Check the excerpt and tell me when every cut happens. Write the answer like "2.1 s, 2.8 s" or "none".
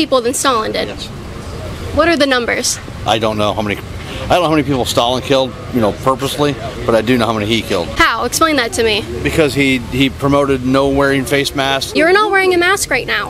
7.9 s, 11.8 s